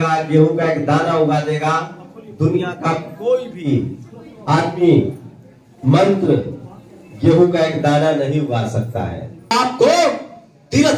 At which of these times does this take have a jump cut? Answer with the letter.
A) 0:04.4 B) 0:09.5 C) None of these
B